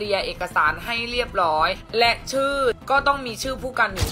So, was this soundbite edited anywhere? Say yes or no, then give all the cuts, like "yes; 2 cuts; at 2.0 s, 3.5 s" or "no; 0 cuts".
yes; 2 cuts; at 1.8 s, 2.8 s